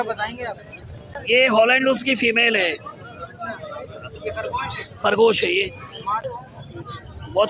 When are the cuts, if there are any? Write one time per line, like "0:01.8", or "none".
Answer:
0:01.2
0:06.3